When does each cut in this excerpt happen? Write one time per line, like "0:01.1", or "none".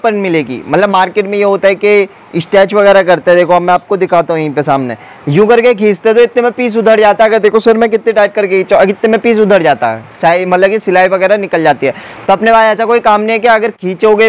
none